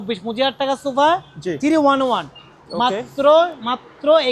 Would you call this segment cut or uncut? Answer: uncut